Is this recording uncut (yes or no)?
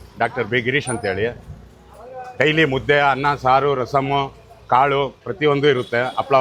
yes